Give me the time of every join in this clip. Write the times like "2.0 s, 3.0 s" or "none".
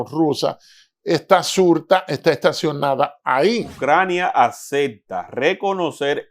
3.7 s